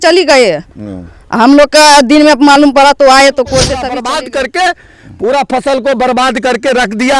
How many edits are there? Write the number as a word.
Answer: one